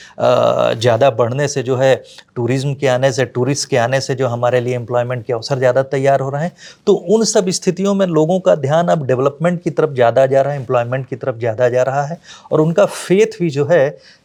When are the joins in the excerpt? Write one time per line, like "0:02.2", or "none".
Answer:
none

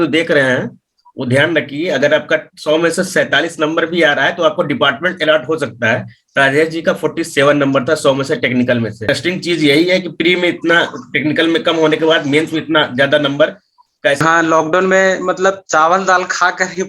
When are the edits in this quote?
0:09.1
0:14.2

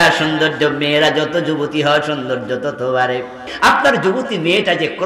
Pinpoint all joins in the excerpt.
0:03.5

